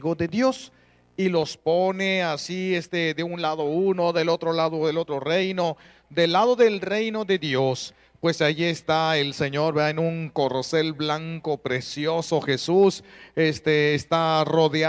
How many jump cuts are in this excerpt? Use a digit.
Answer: 1